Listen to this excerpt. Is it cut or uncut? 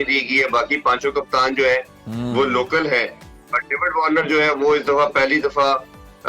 uncut